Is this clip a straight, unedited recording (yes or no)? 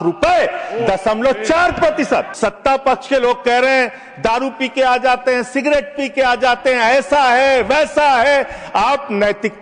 no